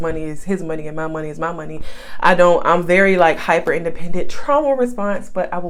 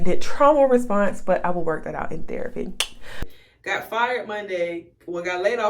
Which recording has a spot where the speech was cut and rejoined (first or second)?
second